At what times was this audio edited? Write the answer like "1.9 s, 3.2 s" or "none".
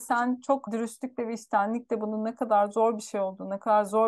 none